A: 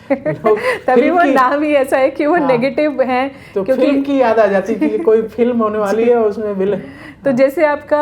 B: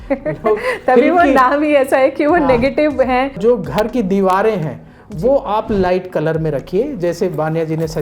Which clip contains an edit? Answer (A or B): B